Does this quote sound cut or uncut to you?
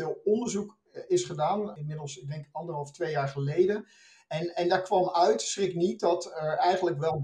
cut